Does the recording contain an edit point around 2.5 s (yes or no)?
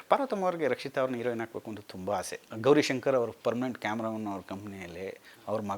yes